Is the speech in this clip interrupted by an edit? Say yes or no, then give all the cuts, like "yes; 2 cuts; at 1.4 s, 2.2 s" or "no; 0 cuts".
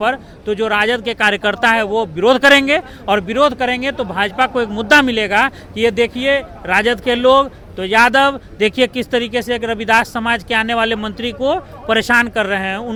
no; 0 cuts